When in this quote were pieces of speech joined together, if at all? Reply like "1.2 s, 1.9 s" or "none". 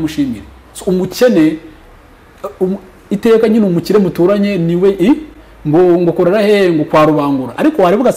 none

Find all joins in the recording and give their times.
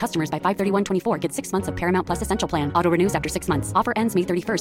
none

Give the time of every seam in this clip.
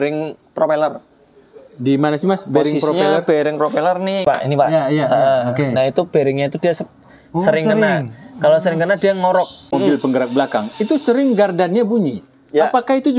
4.2 s, 9.7 s

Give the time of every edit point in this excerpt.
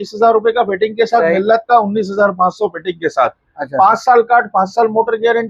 none

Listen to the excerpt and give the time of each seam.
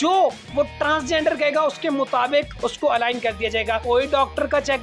3.8 s

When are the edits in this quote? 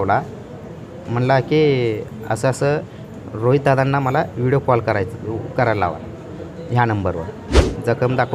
7.4 s

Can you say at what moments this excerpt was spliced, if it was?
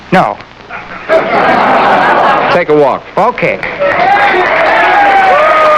none

